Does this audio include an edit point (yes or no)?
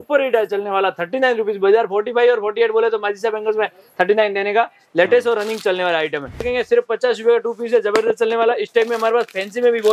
yes